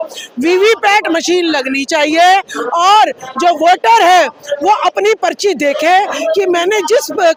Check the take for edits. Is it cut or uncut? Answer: uncut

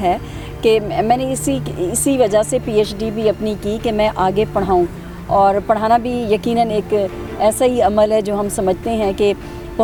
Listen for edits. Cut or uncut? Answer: uncut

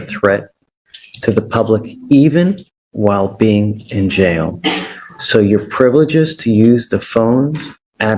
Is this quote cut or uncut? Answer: uncut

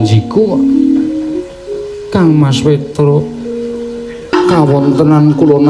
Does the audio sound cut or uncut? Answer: cut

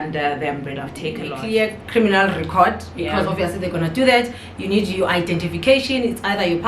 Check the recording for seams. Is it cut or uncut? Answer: cut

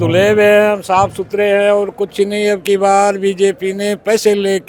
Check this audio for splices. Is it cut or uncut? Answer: uncut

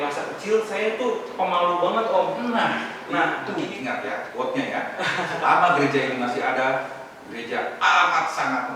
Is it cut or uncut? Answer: cut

